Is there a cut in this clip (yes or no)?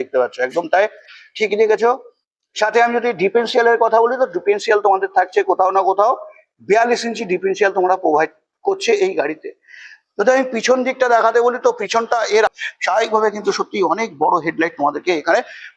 yes